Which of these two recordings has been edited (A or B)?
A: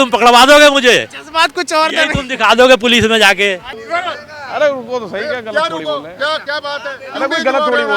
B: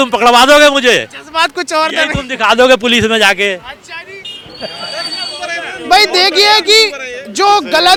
A